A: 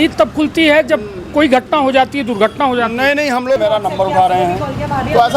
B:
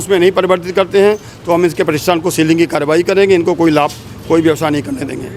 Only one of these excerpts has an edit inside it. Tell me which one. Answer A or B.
A